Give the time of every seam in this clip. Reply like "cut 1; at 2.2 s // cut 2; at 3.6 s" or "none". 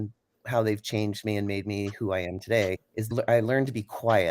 cut 1; at 3.1 s